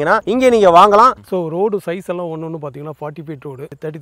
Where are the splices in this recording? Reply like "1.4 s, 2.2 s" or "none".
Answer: 1.2 s